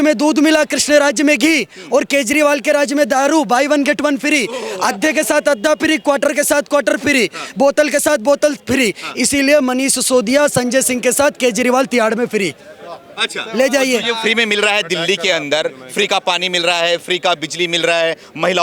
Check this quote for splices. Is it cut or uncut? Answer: uncut